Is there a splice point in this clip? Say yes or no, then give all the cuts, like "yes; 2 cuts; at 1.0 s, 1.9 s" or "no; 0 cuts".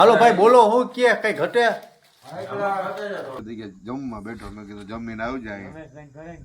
yes; 1 cut; at 3.4 s